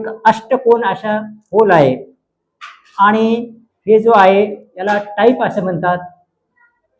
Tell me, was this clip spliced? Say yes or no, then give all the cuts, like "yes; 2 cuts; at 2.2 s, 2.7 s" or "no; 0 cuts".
no; 0 cuts